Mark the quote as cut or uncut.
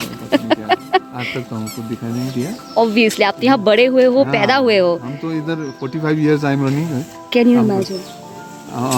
uncut